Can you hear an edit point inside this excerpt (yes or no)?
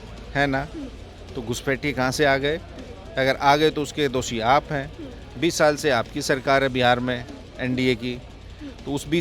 no